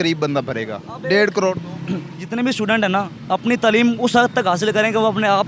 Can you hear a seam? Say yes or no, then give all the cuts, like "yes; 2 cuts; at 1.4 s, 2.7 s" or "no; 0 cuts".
yes; 1 cut; at 2.2 s